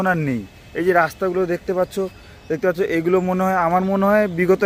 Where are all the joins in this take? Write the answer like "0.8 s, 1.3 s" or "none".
none